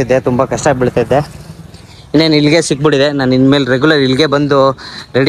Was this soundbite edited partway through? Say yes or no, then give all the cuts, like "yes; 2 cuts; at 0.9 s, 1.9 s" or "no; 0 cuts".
no; 0 cuts